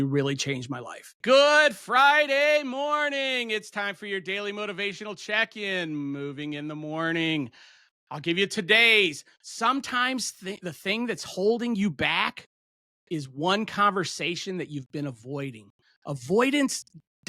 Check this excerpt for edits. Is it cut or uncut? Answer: cut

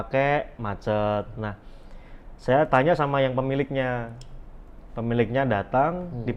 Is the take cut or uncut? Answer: uncut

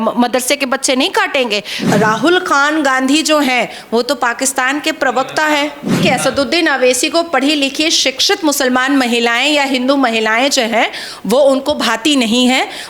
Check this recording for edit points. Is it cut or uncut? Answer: cut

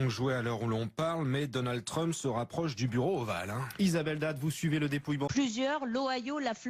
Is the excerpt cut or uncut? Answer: uncut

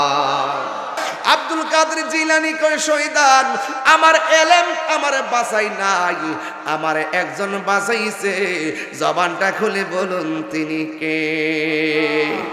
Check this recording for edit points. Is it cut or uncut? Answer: cut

